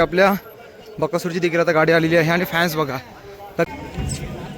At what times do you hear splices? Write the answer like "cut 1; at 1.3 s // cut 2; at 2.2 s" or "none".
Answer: cut 1; at 3.7 s